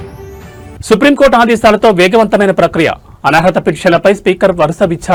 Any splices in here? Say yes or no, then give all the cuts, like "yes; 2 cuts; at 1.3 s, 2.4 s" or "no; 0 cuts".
no; 0 cuts